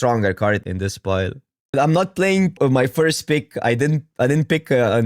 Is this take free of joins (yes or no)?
no